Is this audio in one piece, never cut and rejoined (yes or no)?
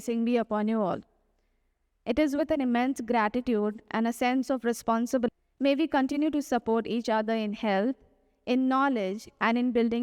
no